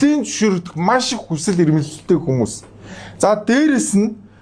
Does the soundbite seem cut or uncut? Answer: uncut